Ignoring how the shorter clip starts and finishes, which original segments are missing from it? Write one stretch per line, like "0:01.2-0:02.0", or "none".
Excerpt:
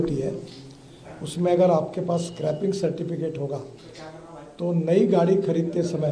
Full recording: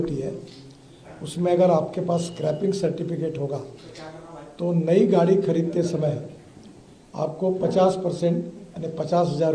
none